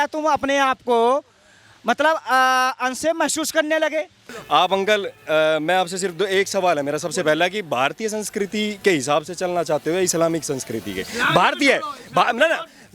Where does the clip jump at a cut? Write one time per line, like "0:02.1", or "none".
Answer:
0:04.3